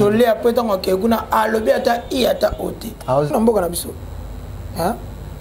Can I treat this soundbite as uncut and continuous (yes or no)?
no